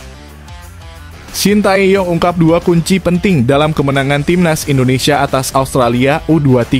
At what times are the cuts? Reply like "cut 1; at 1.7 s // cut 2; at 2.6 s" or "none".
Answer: cut 1; at 1.4 s